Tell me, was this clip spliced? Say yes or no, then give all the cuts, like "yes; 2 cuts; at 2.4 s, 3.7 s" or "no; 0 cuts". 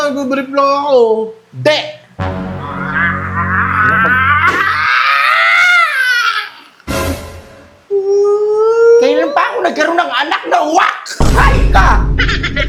no; 0 cuts